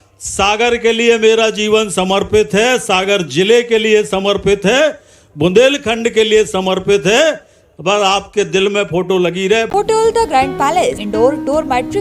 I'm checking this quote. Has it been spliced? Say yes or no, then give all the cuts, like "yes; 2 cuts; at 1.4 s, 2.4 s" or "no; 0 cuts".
yes; 2 cuts; at 9.7 s, 11.0 s